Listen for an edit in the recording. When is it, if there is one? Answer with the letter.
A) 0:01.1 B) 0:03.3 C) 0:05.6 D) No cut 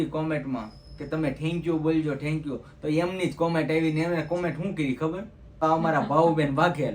C